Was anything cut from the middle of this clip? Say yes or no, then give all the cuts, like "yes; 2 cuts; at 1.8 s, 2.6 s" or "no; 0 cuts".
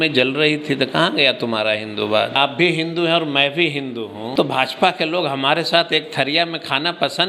yes; 2 cuts; at 2.4 s, 4.3 s